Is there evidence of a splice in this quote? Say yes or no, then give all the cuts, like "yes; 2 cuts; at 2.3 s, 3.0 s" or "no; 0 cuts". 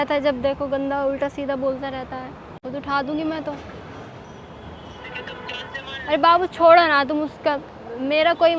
yes; 1 cut; at 2.6 s